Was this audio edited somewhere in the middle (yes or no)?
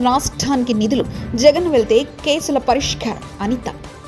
no